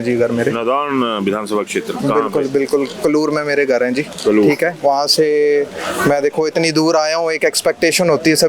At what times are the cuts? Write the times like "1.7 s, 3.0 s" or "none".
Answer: none